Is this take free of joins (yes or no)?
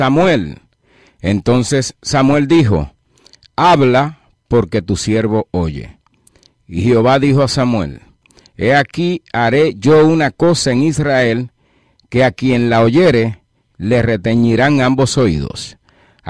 no